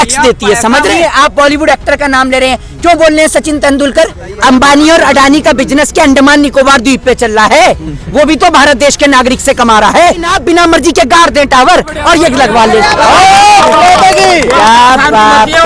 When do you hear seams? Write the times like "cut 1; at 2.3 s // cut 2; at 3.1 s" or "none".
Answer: cut 1; at 0.9 s // cut 2; at 4.2 s // cut 3; at 10.3 s